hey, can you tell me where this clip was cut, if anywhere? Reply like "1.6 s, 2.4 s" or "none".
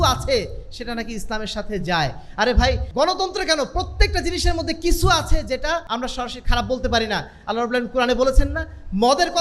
2.9 s, 5.9 s